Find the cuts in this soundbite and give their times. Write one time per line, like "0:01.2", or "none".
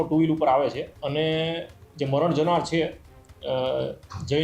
0:00.9